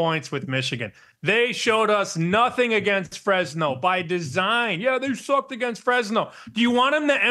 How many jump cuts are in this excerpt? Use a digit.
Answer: 1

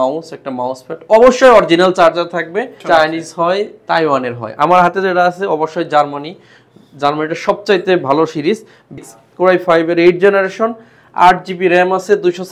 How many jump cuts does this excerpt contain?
2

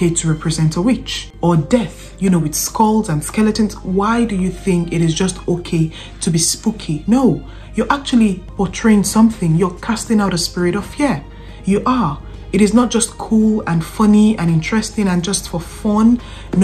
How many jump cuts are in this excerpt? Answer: 0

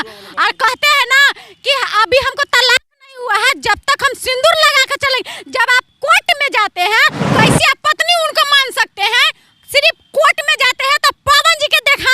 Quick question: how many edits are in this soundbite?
1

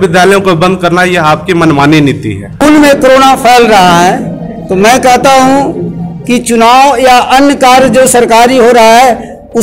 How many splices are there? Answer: 1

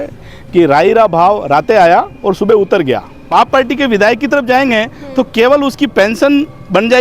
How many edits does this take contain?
1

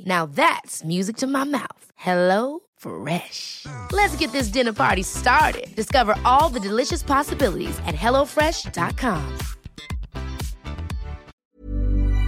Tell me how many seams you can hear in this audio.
1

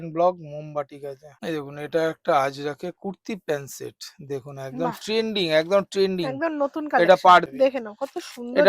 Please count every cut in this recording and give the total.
2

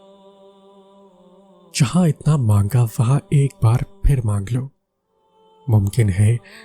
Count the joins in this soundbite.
1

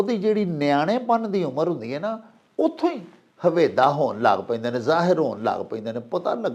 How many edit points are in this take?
0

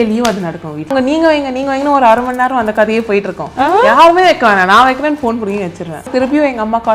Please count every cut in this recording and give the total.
2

